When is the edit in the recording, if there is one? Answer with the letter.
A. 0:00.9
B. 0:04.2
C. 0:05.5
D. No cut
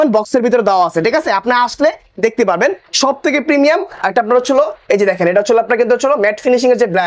D